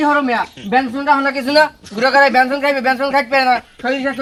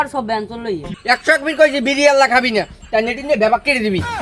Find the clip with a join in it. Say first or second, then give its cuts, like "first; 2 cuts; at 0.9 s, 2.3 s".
second; 1 cut; at 0.9 s